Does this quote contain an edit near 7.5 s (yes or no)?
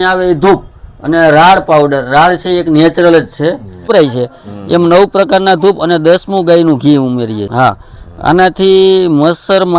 yes